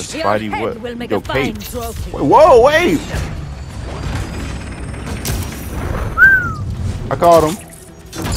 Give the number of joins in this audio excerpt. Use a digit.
1